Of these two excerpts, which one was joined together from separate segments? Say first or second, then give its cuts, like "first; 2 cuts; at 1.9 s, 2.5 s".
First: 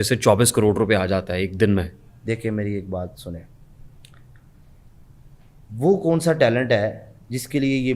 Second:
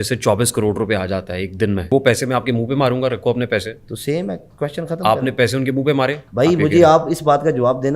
second; 2 cuts; at 1.9 s, 6.2 s